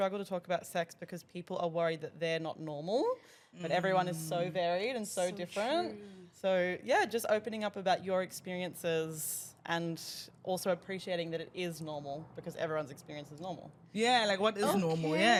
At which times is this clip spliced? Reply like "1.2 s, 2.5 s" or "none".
none

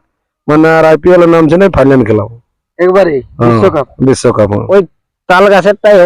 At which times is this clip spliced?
4.6 s

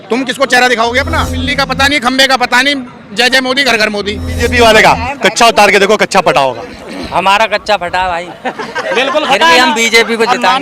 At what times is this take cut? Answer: 1.4 s, 4.4 s

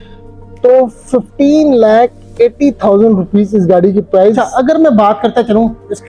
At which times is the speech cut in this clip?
4.5 s

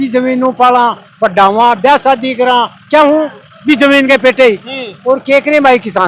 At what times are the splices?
none

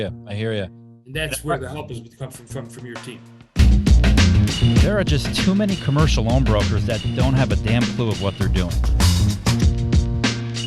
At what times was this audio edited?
3.6 s

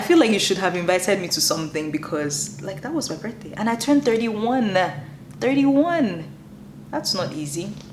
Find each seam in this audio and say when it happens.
none

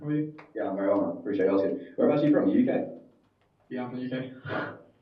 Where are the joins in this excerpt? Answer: none

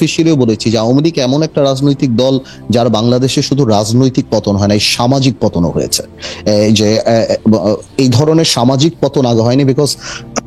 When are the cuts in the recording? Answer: none

